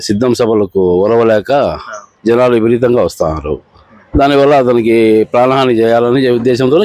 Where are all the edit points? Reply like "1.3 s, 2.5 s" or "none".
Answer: none